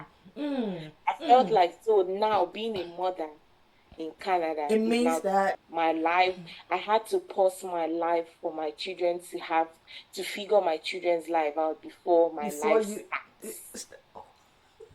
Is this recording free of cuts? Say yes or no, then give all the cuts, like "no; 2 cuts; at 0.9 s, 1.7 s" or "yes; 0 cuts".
no; 1 cut; at 5.6 s